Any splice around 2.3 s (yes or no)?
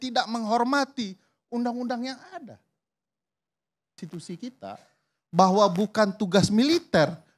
no